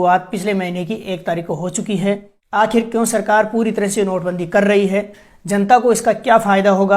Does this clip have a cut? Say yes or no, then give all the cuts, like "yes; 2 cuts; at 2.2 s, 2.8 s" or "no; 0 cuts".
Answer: yes; 1 cut; at 2.4 s